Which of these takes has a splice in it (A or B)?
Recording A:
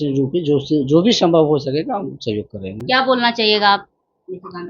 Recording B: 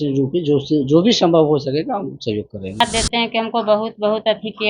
B